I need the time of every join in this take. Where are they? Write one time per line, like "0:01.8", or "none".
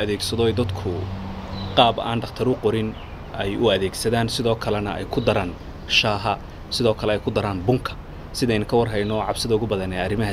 none